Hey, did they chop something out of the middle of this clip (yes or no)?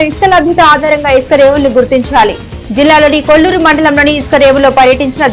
no